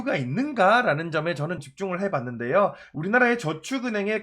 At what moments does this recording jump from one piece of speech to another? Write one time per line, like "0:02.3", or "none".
0:01.6
0:02.9